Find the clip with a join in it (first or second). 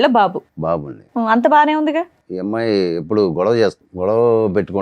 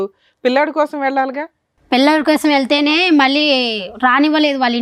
first